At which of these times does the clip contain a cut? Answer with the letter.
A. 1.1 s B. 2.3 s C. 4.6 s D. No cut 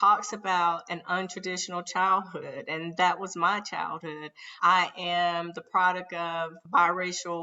D